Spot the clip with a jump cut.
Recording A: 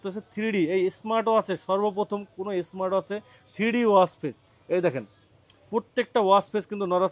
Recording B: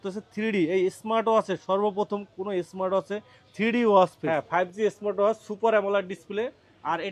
B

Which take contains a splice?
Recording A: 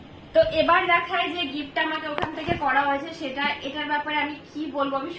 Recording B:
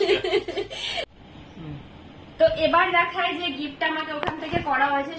B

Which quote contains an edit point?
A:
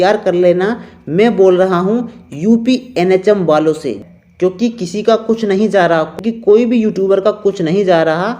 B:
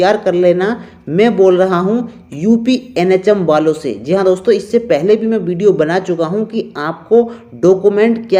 A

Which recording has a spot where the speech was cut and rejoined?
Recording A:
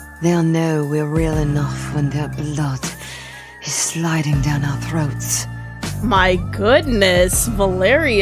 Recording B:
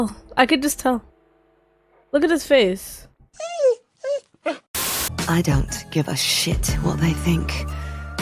B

